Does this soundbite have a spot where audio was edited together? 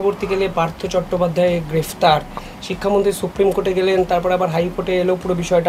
yes; 1 cut; at 2.4 s

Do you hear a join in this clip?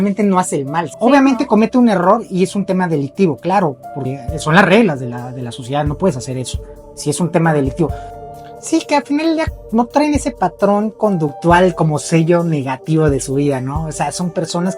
yes; 1 cut; at 8.1 s

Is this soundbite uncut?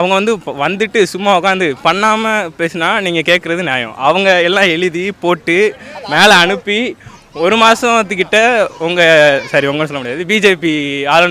yes; 0 cuts

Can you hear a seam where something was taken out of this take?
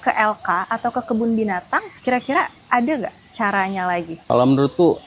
yes; 2 cuts; at 1.9 s, 4.2 s

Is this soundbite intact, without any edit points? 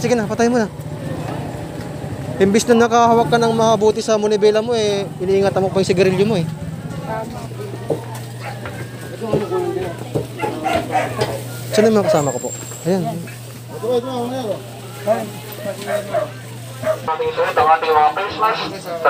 yes; 0 cuts

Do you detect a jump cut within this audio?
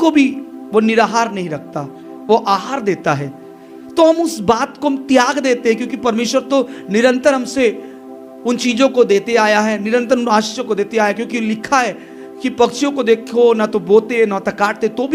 no; 0 cuts

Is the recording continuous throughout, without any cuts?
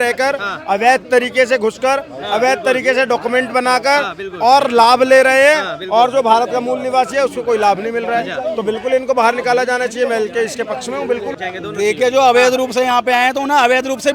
no; 1 cut; at 11.4 s

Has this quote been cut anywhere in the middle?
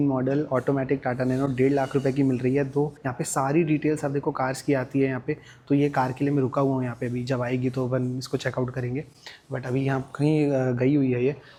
no; 0 cuts

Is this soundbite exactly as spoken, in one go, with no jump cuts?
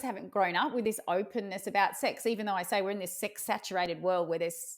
yes; 0 cuts

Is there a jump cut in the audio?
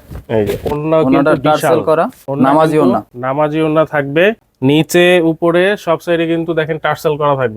yes; 3 cuts; at 2.2 s, 3.2 s, 4.5 s

